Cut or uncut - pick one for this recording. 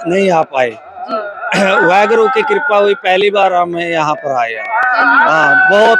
uncut